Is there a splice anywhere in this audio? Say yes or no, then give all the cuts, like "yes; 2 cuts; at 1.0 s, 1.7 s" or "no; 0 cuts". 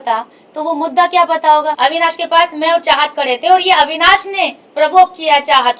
yes; 1 cut; at 1.8 s